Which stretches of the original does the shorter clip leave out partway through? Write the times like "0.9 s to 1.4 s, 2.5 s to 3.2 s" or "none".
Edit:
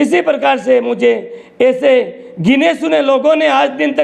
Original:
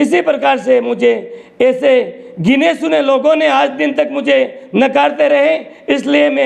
none